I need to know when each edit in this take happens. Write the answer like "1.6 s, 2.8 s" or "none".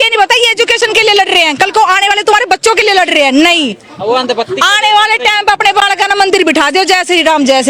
none